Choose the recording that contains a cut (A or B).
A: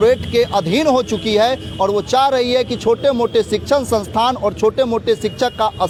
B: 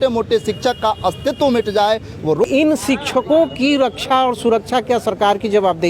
B